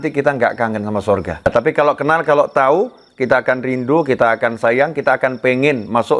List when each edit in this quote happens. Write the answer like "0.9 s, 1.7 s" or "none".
1.4 s